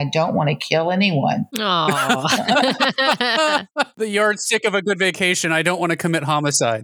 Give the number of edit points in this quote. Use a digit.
2